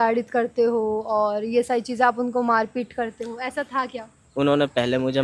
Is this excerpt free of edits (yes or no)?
no